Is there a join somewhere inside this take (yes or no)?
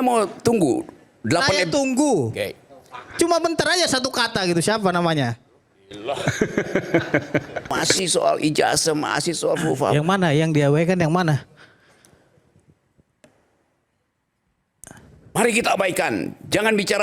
yes